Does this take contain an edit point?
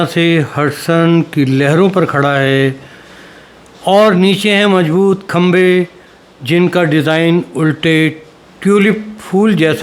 no; 0 cuts

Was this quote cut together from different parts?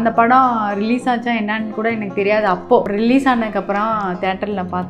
yes; 1 cut; at 2.9 s

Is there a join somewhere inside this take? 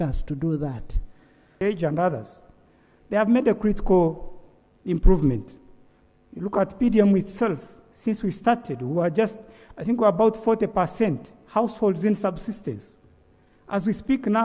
yes; 1 cut; at 1.5 s

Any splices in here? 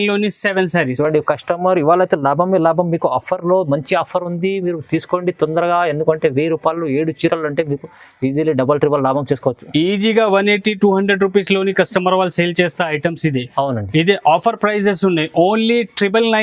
no; 0 cuts

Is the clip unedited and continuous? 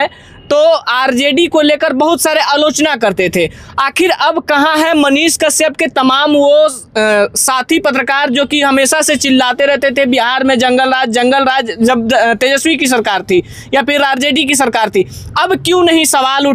yes; 0 cuts

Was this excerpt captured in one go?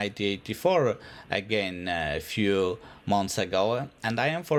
yes; 0 cuts

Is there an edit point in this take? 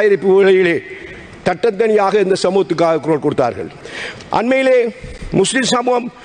yes; 1 cut; at 3.8 s

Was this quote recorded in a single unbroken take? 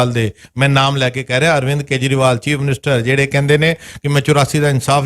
yes; 0 cuts

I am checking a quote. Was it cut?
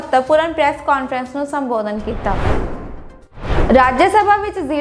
yes; 1 cut; at 3.1 s

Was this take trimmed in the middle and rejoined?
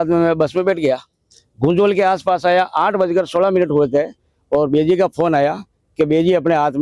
no; 0 cuts

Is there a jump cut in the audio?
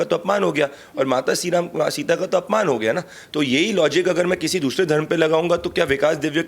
no; 0 cuts

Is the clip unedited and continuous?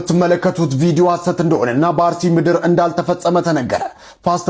yes; 0 cuts

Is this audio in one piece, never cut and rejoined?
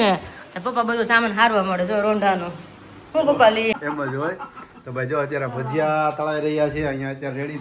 no; 1 cut; at 3.7 s

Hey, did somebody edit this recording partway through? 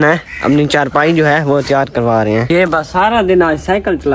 yes; 1 cut; at 2.5 s

